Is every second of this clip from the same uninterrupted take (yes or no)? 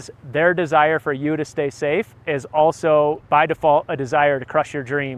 no